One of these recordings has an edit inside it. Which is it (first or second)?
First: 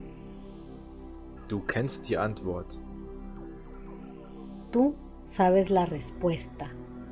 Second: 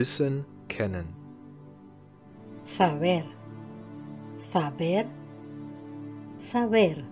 first